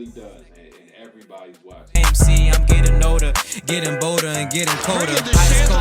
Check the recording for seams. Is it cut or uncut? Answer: cut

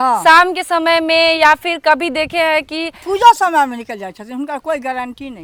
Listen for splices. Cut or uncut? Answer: uncut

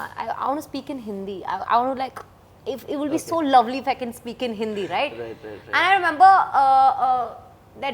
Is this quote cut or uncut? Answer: uncut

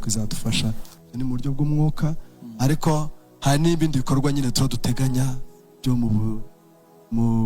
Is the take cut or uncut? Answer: cut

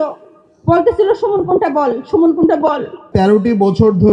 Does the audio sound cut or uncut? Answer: cut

